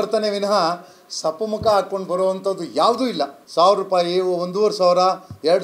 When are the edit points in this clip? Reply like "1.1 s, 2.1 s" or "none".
3.4 s